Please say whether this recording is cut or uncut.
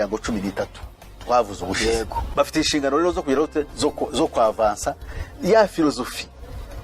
cut